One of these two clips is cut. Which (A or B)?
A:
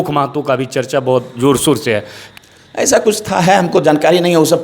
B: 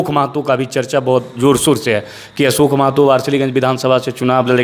A